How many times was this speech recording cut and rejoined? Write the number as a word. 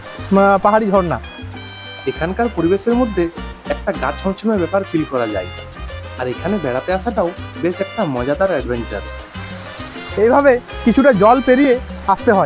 zero